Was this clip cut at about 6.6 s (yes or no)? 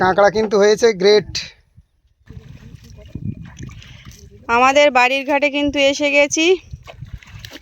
no